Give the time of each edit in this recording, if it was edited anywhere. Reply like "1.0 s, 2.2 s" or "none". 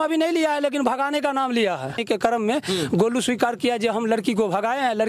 1.9 s